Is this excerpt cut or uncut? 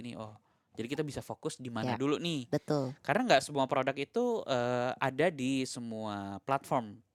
uncut